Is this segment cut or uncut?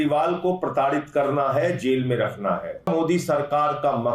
cut